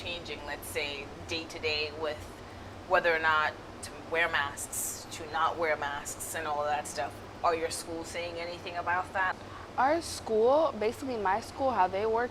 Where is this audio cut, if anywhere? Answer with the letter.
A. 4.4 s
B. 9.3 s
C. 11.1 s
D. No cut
B